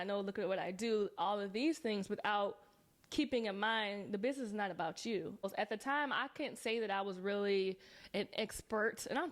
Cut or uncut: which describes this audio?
cut